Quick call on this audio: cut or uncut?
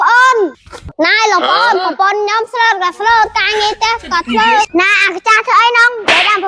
cut